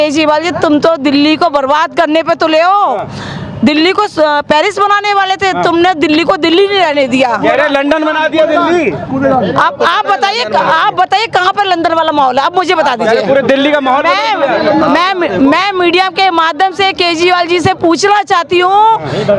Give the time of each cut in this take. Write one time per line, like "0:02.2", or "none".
none